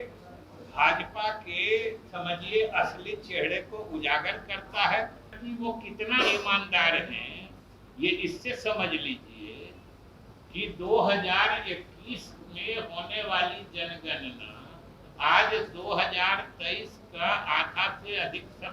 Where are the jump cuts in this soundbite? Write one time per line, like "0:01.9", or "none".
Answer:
0:05.4